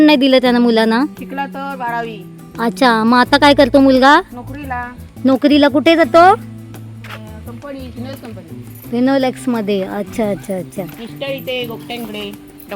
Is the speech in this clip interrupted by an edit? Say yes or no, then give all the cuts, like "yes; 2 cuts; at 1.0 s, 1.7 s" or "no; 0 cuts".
no; 0 cuts